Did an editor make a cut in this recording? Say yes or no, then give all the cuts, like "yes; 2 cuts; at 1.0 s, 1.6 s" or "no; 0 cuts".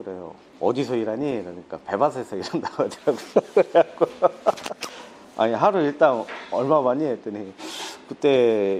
no; 0 cuts